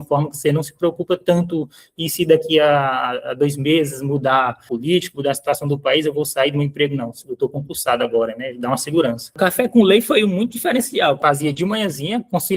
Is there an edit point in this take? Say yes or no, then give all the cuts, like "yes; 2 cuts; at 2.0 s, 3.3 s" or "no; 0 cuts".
yes; 3 cuts; at 4.7 s, 9.3 s, 11.2 s